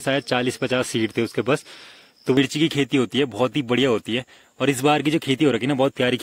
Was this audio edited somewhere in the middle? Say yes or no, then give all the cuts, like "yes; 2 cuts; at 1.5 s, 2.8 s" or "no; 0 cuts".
yes; 1 cut; at 2.4 s